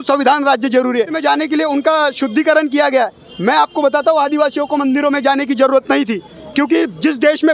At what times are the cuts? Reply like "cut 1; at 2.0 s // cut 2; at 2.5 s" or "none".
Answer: cut 1; at 1.2 s